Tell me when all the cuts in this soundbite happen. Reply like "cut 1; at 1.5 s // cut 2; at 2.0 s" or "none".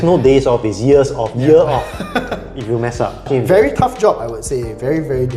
cut 1; at 3.3 s